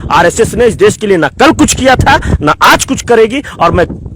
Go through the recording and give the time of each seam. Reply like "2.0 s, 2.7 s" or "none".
none

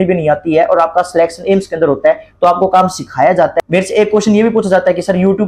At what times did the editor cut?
3.5 s

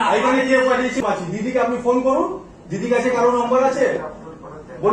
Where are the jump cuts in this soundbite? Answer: 1.0 s

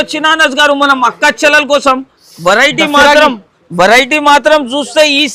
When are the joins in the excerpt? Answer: none

